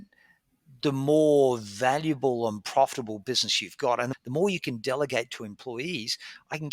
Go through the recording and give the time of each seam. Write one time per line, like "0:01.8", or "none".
0:04.1